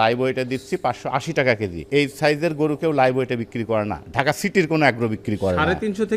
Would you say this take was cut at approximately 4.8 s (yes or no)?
no